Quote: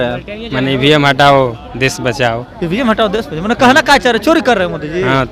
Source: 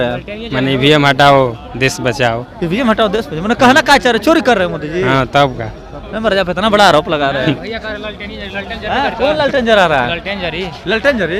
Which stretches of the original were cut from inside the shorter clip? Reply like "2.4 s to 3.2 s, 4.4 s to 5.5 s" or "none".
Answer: none